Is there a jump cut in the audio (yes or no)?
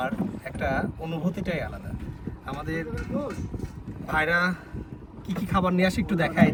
no